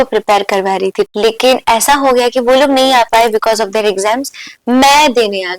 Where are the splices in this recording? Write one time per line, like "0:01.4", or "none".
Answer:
0:01.1